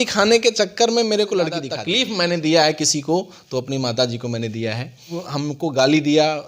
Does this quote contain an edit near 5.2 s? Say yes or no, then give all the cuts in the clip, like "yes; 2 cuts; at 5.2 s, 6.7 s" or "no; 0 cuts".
yes; 2 cuts; at 1.8 s, 5.2 s